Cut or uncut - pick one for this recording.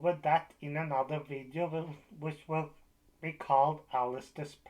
uncut